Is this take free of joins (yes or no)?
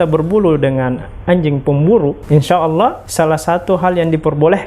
no